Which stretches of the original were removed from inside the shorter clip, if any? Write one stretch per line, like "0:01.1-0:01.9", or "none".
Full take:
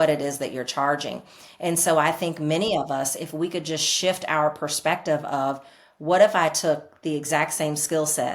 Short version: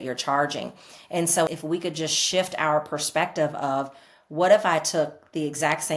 0:02.0-0:03.2